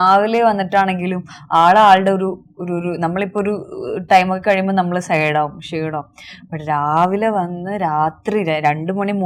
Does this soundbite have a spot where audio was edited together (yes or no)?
no